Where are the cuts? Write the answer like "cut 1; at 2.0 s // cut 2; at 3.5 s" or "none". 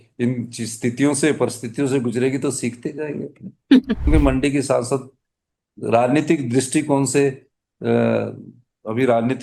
cut 1; at 4.1 s